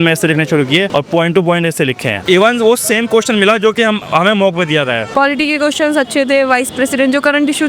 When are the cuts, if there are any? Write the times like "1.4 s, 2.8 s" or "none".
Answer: 0.9 s, 2.2 s, 5.0 s